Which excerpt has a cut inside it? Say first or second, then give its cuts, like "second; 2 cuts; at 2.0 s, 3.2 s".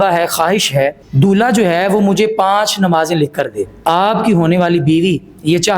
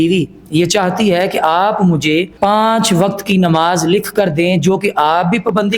first; 2 cuts; at 1.0 s, 3.8 s